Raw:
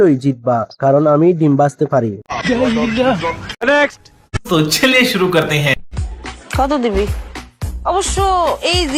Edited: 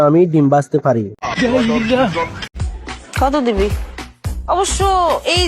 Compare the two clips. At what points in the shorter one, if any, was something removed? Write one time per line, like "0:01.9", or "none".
0:02.5